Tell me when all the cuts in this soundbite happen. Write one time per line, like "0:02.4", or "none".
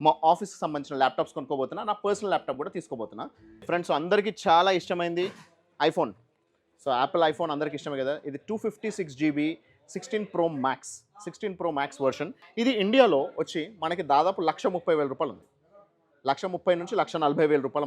0:03.5
0:12.4

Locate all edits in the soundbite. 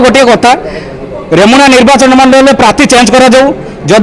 none

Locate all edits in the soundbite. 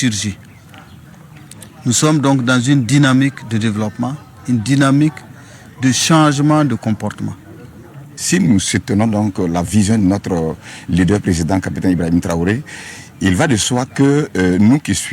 0:04.3

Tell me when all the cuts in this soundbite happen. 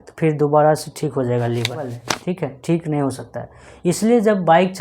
0:02.1

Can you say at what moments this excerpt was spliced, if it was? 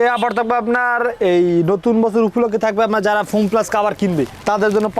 none

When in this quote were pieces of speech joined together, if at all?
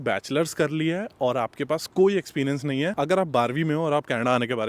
0:02.9

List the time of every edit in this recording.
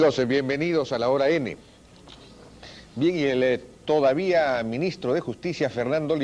0:03.9

